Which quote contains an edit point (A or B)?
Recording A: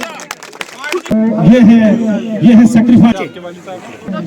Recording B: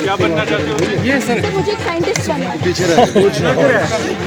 A